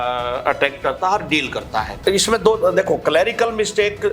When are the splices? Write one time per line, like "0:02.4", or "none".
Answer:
0:01.9